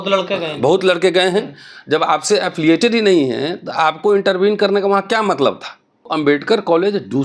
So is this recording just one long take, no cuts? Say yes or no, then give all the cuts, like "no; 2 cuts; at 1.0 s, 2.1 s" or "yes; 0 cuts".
no; 1 cut; at 6.1 s